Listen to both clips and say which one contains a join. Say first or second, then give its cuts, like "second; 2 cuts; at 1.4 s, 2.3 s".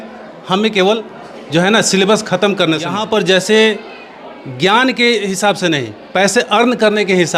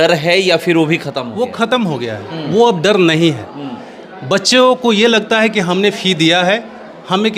first; 1 cut; at 2.9 s